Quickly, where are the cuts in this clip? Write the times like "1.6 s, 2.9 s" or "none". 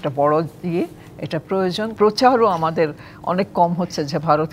1.9 s